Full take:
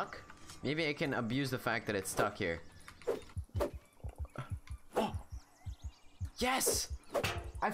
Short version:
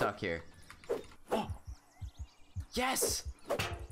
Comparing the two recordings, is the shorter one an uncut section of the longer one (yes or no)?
no